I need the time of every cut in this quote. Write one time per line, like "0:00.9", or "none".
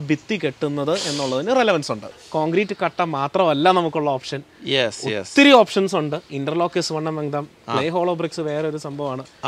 0:02.0